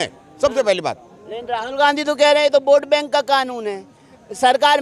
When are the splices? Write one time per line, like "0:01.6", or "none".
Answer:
none